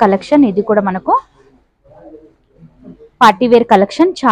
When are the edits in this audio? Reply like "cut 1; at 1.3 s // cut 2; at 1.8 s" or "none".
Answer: none